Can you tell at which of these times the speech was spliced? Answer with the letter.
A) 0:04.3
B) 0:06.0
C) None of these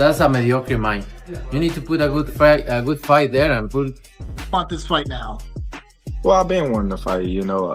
C